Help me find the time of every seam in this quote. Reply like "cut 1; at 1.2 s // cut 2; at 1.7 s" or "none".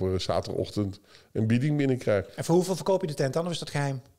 cut 1; at 2.3 s